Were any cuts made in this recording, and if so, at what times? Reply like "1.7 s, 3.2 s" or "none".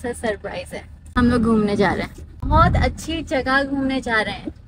1.0 s, 2.5 s